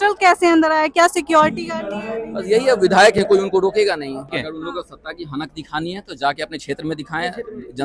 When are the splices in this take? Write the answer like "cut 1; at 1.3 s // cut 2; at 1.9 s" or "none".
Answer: cut 1; at 4.2 s